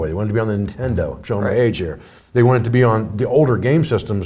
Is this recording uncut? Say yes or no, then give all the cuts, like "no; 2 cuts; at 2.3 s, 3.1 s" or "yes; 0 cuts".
yes; 0 cuts